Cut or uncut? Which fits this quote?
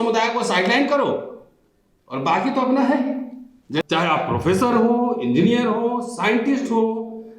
cut